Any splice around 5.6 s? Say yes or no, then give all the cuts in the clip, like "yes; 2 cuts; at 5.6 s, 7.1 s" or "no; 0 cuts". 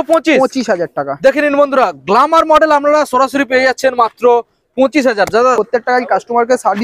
yes; 1 cut; at 5.6 s